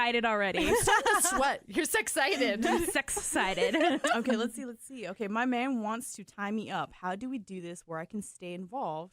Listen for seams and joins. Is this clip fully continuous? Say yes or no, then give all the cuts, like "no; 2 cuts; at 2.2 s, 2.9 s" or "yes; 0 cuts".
yes; 0 cuts